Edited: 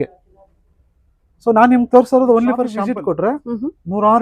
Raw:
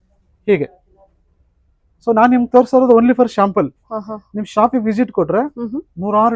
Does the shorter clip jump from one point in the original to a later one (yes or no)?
yes